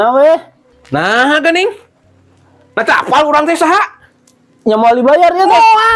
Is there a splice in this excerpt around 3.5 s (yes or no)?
no